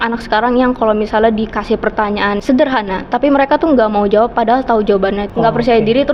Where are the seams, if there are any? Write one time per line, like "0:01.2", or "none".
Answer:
0:02.4
0:05.2